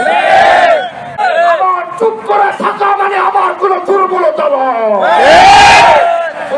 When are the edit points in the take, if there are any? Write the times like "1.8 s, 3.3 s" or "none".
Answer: 1.2 s

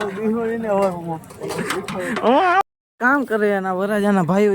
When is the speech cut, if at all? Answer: 2.6 s

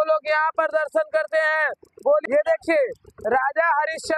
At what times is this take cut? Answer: 2.2 s

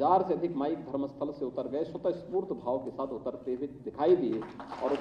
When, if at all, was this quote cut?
none

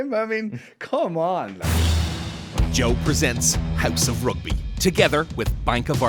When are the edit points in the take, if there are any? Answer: 1.6 s

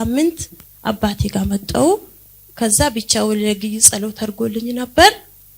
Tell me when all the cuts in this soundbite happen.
none

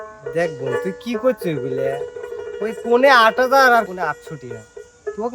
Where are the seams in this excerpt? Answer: 3.9 s

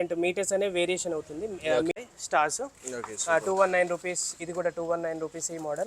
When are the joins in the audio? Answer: 1.9 s

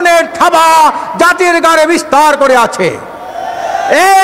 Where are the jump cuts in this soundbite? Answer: none

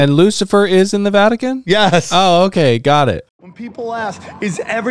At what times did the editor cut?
3.3 s

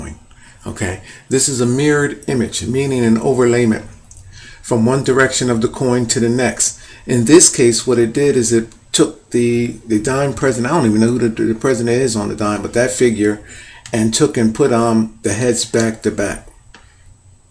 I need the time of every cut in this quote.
none

